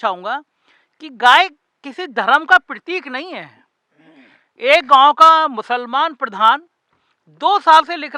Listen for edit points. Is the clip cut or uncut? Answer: uncut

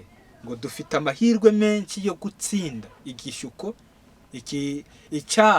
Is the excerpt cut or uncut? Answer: uncut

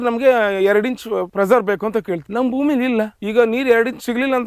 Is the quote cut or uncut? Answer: cut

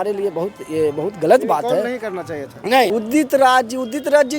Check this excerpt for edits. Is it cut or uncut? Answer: cut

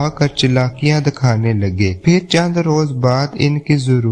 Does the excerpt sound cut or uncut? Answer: uncut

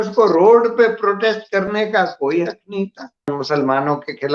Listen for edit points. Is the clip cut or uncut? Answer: cut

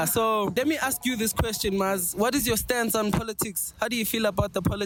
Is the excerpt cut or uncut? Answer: uncut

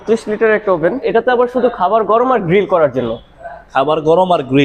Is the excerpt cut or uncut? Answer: cut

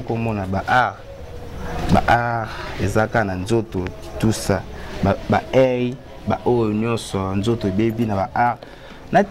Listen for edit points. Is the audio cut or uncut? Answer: uncut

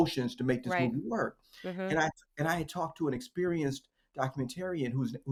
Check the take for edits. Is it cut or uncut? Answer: uncut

